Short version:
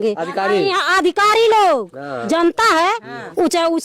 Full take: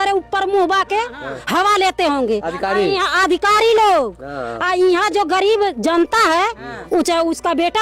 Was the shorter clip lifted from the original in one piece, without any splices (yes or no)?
no